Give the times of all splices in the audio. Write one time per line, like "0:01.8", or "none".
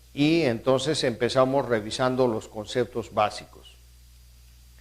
0:02.5